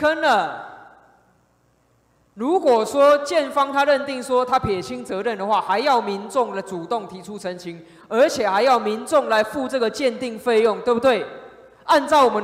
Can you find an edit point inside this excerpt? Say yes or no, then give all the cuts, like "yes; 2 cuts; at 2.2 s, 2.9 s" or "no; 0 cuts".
no; 0 cuts